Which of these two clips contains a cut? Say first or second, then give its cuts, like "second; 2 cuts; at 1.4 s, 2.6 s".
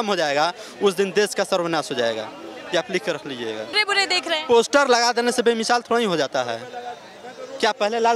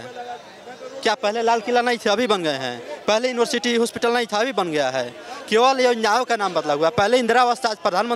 first; 1 cut; at 3.8 s